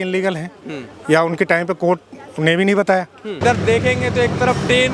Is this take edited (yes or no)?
yes